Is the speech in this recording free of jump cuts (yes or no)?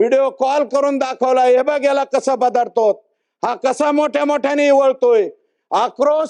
yes